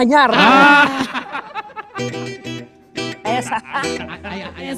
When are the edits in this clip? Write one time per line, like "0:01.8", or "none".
none